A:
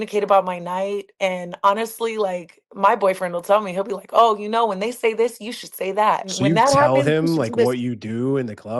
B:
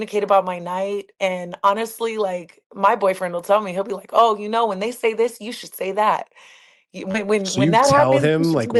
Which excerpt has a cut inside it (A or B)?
A